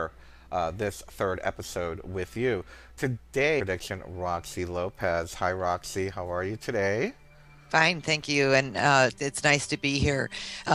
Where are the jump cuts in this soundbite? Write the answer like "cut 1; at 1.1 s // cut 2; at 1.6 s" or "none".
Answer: none

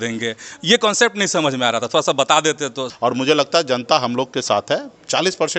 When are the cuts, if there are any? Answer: cut 1; at 2.8 s

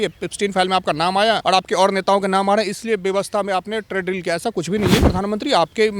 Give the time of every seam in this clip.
cut 1; at 1.4 s // cut 2; at 5.0 s

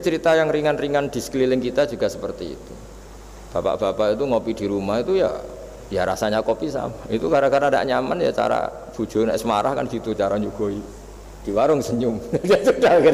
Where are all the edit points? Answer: none

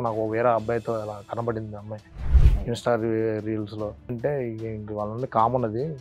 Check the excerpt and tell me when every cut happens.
cut 1; at 4.2 s

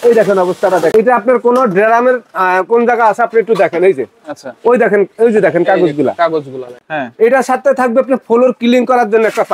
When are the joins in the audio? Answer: cut 1; at 0.9 s // cut 2; at 6.7 s

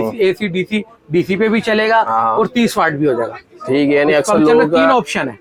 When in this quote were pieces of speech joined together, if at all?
none

